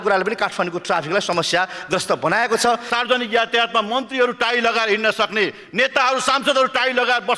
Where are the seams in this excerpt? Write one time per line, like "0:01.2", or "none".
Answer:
0:02.9

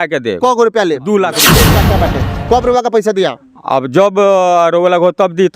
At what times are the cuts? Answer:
0:01.8

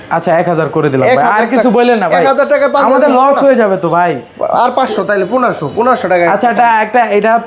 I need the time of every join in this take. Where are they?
none

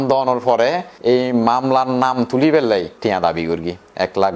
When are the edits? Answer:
0:00.9
0:02.9

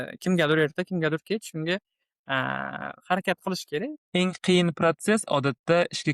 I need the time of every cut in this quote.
0:04.0

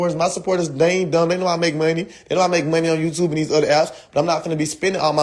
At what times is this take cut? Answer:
none

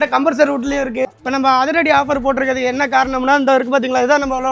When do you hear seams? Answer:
0:01.1

